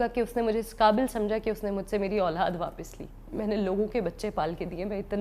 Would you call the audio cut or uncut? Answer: uncut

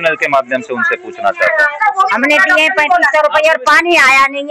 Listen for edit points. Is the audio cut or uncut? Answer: cut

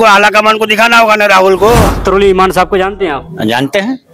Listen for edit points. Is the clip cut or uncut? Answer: cut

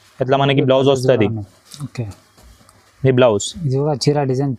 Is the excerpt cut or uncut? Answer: uncut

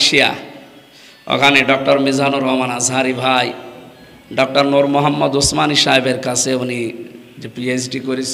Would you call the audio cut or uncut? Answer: uncut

